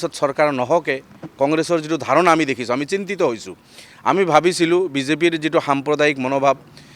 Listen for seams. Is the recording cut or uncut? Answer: uncut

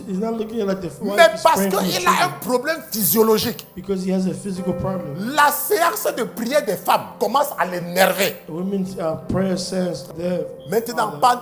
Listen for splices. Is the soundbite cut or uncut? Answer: cut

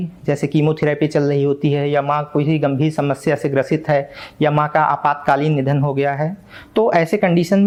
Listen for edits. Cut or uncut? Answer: uncut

